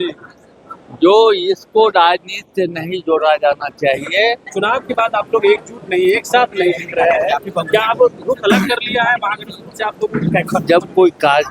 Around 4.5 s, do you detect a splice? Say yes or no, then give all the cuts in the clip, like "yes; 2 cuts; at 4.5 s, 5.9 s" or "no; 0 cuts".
yes; 1 cut; at 4.5 s